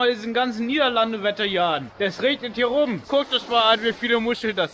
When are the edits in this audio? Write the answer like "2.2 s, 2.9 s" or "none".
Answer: 1.9 s, 3.0 s

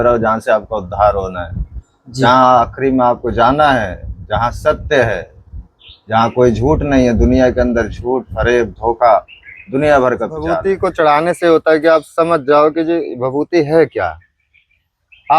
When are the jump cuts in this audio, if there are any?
10.6 s

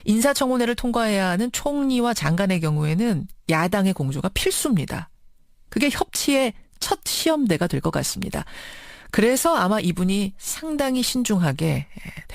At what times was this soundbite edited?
10.8 s

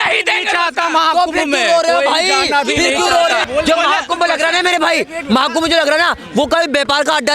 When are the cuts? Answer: 3.4 s

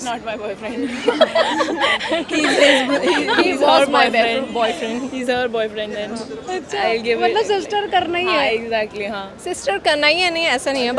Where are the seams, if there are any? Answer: none

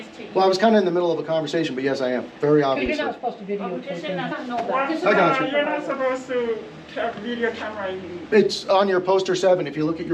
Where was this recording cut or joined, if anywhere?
4.4 s, 8.2 s

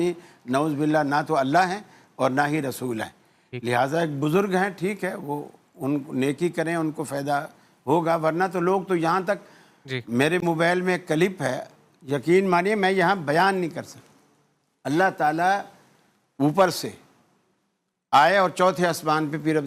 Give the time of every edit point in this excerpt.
none

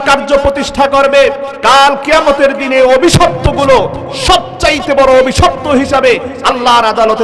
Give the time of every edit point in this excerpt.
1.5 s

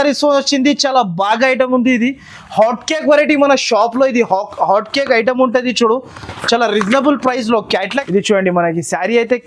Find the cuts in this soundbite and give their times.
7.9 s

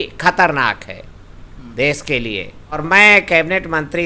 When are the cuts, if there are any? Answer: 2.8 s

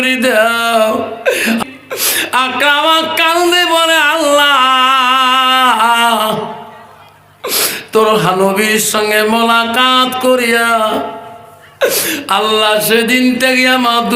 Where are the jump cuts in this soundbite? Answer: 1.6 s

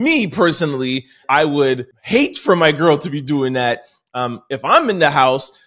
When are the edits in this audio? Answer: 1.2 s, 1.9 s

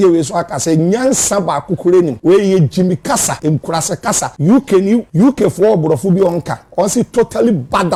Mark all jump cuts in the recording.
none

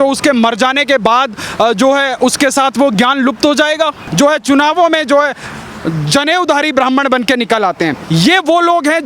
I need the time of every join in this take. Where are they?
4.0 s, 8.0 s

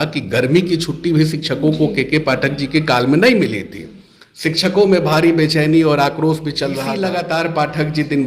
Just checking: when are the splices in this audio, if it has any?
6.9 s

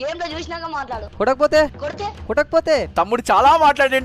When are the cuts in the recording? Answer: 1.1 s, 2.9 s

